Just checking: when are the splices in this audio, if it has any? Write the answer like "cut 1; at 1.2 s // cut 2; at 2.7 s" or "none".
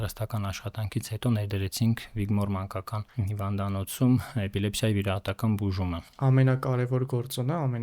cut 1; at 6.1 s